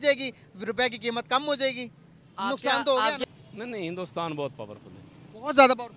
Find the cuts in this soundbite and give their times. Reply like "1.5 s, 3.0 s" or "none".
3.2 s